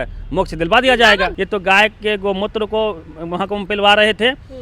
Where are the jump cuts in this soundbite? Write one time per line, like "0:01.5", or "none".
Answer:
0:01.4